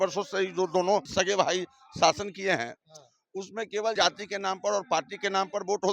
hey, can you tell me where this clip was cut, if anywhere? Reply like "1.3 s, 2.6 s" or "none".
1.1 s, 3.9 s